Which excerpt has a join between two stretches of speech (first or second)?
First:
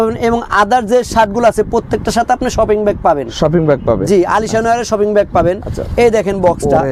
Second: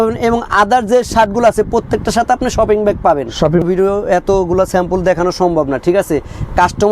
second